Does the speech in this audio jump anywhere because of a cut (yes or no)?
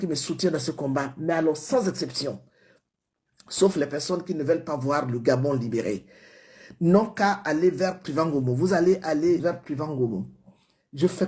yes